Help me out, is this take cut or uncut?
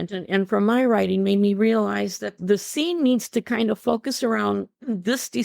cut